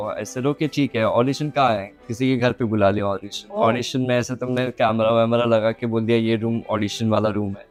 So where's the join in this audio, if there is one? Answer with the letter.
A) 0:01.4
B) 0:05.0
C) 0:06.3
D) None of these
D